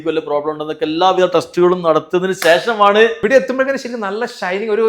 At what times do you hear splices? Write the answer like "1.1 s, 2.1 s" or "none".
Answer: 3.2 s